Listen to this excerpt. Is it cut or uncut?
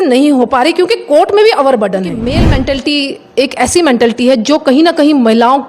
cut